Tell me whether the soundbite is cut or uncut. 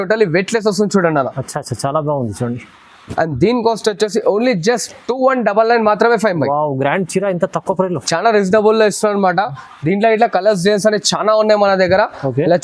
uncut